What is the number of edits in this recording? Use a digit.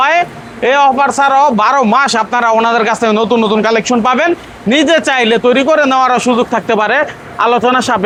0